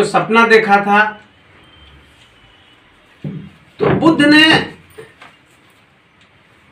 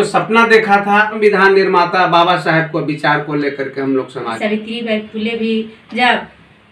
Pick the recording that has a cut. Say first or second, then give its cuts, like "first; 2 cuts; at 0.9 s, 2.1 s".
second; 2 cuts; at 1.2 s, 4.3 s